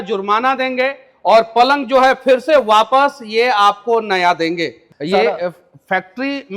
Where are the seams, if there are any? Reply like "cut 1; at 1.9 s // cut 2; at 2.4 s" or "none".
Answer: cut 1; at 4.9 s

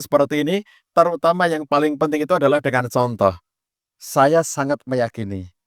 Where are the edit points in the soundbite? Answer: none

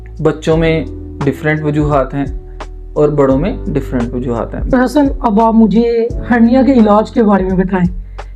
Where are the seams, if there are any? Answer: cut 1; at 4.7 s

